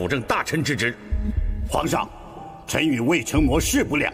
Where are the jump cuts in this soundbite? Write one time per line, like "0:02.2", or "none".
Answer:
0:01.2